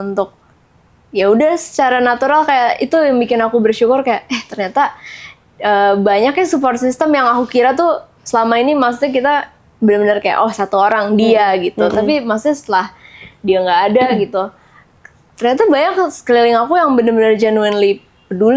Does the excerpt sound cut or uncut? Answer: uncut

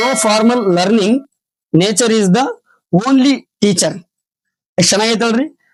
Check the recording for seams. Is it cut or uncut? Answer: uncut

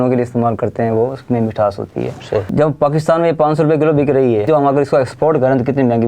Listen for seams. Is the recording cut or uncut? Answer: cut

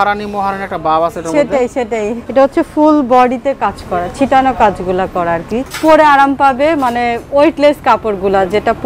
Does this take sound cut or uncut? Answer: cut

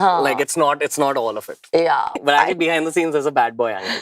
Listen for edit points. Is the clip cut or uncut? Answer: cut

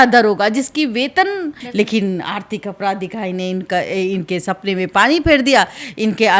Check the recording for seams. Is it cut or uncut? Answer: cut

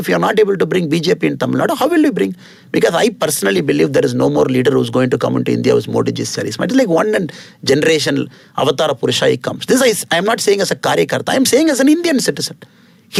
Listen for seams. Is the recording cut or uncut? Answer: uncut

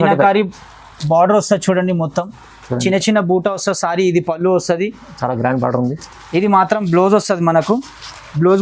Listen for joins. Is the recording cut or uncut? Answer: uncut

